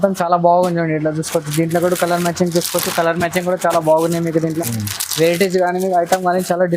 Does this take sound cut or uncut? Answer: uncut